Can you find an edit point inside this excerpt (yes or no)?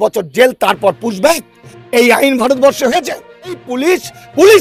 yes